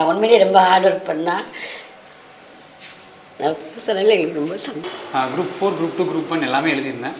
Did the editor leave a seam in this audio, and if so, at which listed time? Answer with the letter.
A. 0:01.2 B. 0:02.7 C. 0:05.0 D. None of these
C